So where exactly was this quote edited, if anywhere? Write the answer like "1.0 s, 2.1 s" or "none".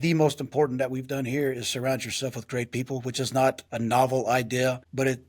3.7 s